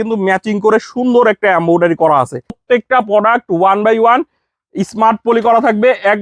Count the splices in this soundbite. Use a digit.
1